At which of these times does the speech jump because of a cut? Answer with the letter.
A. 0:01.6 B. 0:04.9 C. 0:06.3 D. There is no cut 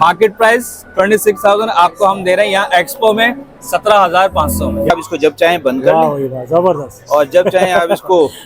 B